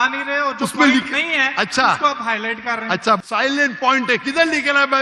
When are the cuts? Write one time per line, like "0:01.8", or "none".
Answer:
0:03.2